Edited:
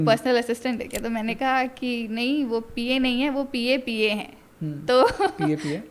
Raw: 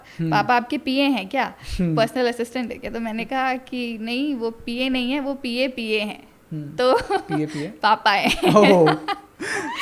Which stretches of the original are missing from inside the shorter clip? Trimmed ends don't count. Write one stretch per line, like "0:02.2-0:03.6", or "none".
none